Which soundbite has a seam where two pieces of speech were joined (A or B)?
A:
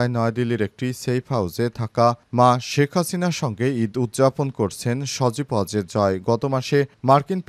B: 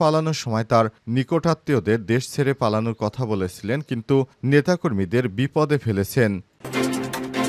B